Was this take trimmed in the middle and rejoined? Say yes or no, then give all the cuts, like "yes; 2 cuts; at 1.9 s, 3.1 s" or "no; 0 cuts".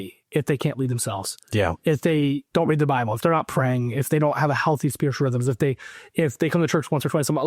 no; 0 cuts